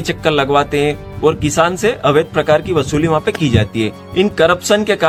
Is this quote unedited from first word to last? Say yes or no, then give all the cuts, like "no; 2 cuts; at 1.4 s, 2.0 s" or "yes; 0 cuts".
yes; 0 cuts